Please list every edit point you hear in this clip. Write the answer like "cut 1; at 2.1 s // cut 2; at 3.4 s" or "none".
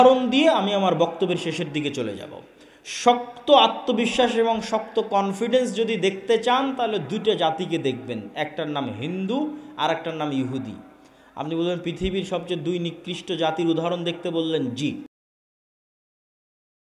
none